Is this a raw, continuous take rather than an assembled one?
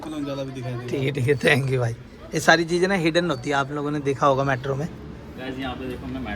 no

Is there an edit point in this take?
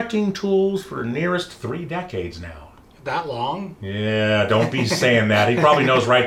no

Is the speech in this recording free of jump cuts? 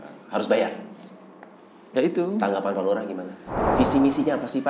no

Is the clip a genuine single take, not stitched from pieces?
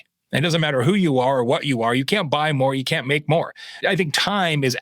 no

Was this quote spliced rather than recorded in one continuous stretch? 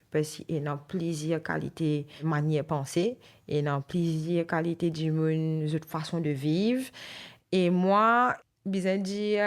yes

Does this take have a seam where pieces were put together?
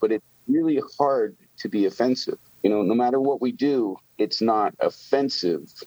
yes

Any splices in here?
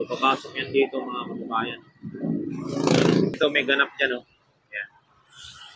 yes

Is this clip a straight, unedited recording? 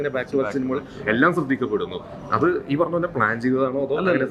yes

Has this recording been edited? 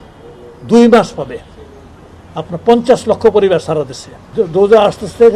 yes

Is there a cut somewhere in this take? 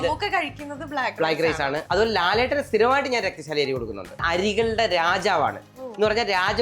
yes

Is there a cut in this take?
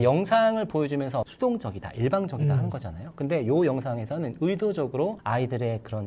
yes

